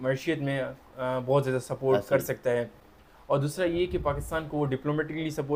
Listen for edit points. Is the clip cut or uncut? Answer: uncut